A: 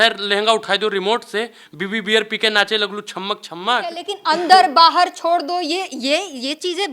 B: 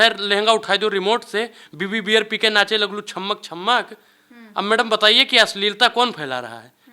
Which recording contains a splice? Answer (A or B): A